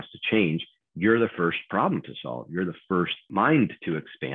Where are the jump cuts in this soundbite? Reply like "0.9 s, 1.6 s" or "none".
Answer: 3.2 s